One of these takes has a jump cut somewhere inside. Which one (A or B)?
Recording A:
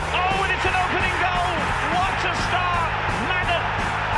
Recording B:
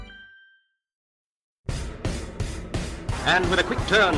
B